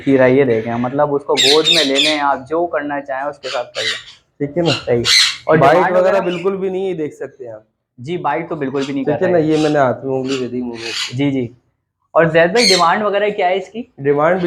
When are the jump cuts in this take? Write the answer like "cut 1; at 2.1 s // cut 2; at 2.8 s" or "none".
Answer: none